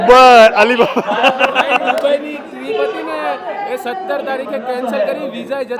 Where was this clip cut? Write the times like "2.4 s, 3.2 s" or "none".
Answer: none